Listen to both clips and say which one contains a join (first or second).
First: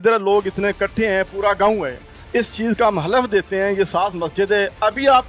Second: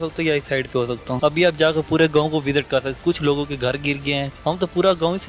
second